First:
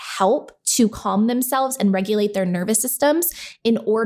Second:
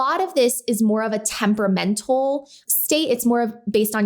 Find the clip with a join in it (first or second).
second